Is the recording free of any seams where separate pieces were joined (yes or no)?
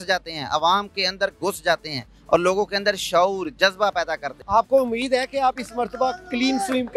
no